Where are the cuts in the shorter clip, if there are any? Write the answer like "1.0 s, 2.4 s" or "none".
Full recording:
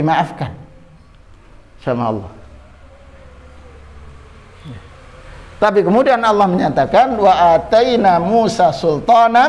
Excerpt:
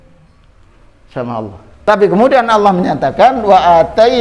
1.9 s